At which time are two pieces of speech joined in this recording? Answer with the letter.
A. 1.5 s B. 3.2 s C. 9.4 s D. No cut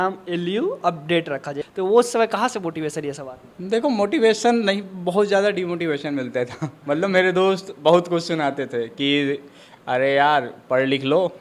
A